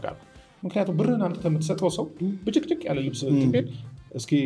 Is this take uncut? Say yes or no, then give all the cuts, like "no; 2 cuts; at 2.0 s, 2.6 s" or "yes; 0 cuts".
yes; 0 cuts